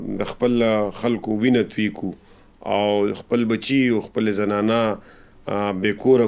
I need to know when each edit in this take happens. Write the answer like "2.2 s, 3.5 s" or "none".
none